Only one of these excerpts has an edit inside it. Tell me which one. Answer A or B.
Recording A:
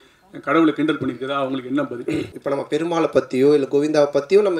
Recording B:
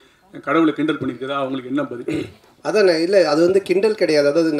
A